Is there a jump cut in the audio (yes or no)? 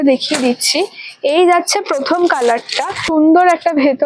yes